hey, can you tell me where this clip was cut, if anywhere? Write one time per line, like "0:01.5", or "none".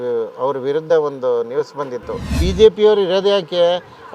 0:02.3